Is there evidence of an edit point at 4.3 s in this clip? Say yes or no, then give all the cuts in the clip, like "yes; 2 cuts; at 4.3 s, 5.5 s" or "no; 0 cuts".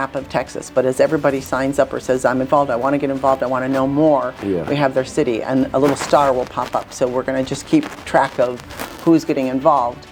no; 0 cuts